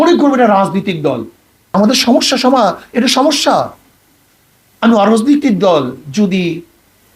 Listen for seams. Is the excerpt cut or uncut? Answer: cut